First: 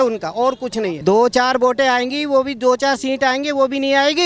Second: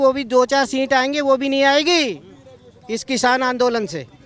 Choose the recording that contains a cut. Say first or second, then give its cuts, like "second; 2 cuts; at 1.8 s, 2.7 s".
first; 1 cut; at 1.0 s